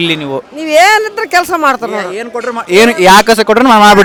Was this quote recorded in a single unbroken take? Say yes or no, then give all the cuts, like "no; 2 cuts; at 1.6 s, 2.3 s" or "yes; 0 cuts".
yes; 0 cuts